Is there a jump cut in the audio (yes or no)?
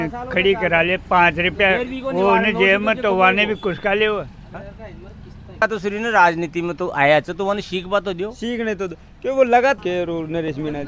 yes